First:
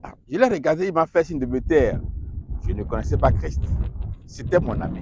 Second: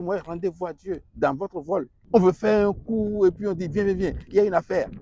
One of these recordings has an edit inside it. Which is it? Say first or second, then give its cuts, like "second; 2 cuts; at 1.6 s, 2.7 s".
second; 1 cut; at 2.0 s